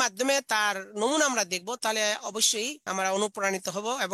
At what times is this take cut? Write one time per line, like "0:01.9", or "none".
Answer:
0:02.8

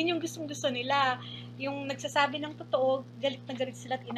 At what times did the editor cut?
none

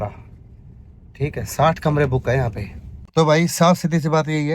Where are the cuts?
0:03.0

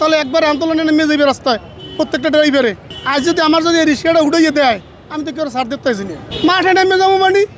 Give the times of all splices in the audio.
0:02.9

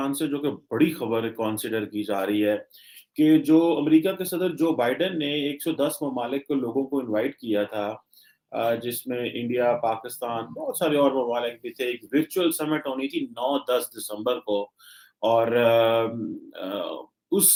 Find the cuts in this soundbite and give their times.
none

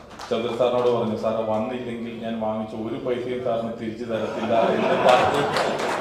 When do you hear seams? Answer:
none

